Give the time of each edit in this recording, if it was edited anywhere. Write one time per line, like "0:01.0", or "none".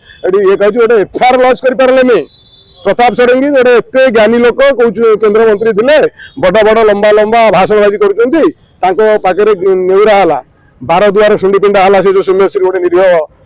none